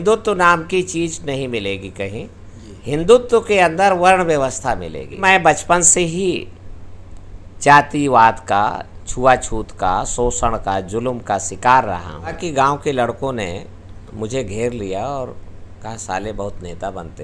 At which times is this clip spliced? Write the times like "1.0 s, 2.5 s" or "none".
5.2 s, 12.4 s